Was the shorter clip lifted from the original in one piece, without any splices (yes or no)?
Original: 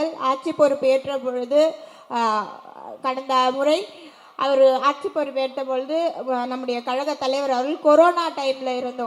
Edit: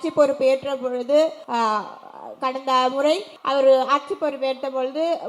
no